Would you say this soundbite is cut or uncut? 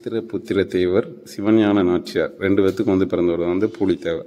uncut